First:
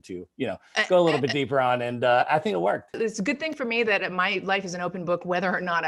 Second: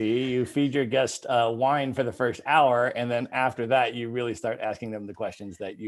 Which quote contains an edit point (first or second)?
first